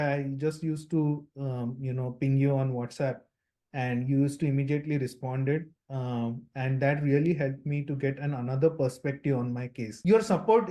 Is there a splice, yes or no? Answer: no